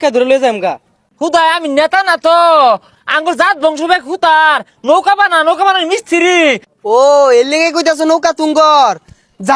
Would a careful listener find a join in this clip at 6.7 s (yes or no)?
yes